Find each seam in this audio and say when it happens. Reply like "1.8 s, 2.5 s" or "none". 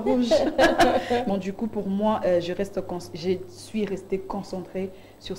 1.3 s